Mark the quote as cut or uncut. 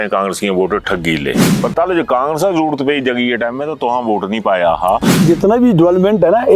cut